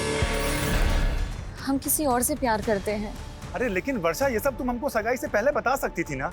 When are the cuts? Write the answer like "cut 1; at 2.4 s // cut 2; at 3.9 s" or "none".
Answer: cut 1; at 1.2 s